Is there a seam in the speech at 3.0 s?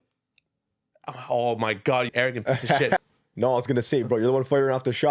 yes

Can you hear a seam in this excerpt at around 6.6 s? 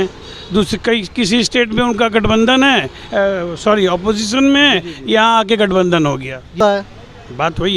yes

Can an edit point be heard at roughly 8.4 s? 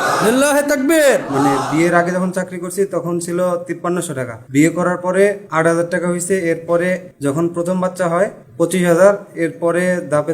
yes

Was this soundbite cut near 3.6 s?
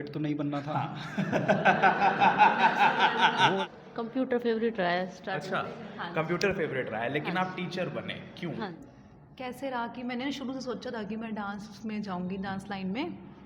yes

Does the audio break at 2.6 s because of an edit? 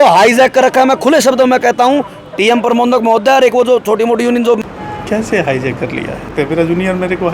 no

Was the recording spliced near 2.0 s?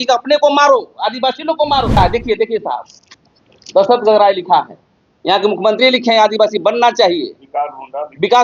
yes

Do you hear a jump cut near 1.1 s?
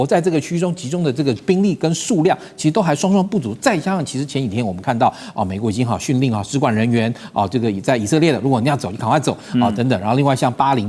no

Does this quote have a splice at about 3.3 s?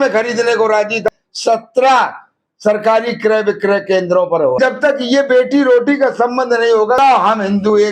no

